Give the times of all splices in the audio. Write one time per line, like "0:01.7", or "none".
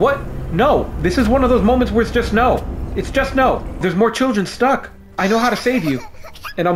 0:03.8
0:05.0